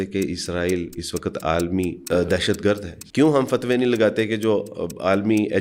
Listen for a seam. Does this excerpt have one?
yes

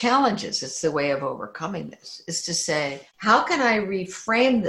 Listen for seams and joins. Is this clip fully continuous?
no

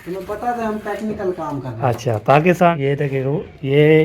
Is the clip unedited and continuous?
no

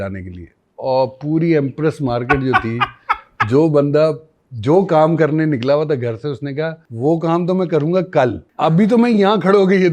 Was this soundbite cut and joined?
yes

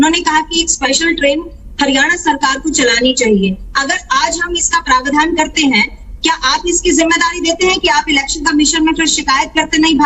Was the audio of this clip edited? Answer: no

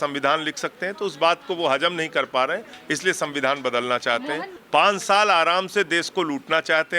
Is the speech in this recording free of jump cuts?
no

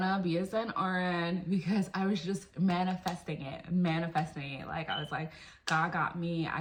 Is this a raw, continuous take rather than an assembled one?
yes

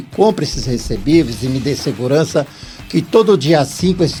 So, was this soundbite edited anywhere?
no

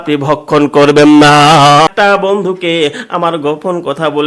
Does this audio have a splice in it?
yes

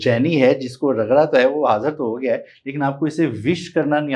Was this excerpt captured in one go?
yes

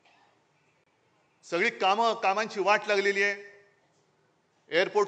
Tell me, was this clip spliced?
no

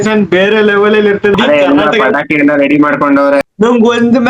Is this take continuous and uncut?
no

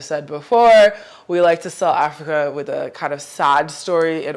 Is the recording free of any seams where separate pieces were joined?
yes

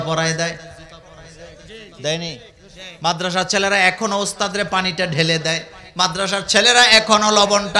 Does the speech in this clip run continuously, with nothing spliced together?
yes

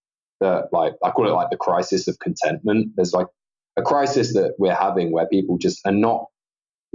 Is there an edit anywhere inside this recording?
no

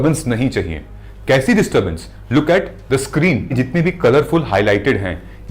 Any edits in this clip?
yes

